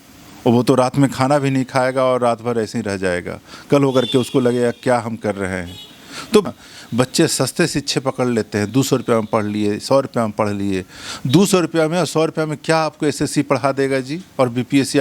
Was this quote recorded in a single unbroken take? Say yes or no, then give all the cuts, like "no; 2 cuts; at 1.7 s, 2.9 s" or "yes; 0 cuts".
no; 1 cut; at 6.5 s